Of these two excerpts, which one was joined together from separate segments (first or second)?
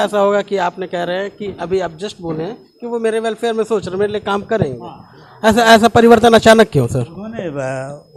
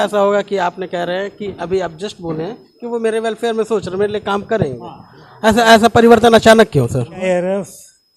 second